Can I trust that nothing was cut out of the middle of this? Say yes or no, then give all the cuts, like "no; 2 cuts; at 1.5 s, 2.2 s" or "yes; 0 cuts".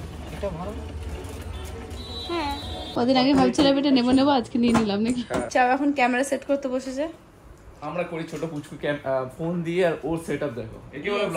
no; 2 cuts; at 2.8 s, 5.5 s